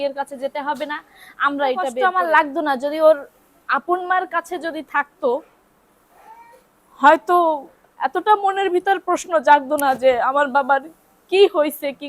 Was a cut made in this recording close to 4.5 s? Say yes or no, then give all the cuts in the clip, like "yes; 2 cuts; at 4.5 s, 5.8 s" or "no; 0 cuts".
no; 1 cut; at 2.0 s